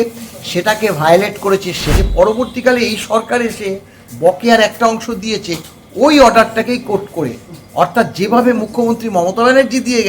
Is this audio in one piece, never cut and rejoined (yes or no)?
no